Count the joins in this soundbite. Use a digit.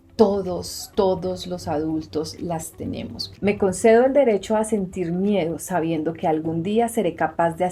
1